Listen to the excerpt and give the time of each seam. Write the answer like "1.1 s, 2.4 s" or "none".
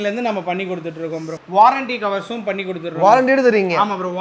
1.4 s